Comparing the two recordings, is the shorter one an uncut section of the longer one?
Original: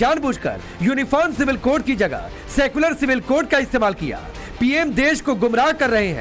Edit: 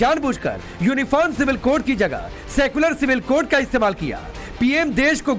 yes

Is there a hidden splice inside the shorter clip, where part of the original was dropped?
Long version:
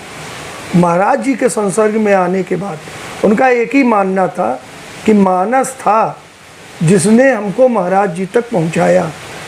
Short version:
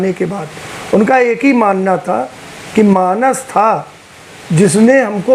no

